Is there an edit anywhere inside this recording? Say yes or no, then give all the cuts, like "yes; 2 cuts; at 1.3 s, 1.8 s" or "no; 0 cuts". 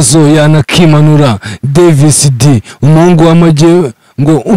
no; 0 cuts